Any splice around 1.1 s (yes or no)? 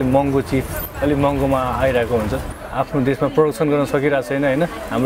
no